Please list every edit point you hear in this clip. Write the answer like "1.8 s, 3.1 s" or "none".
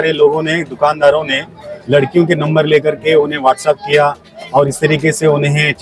none